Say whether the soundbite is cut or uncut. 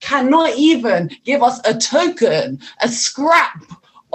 uncut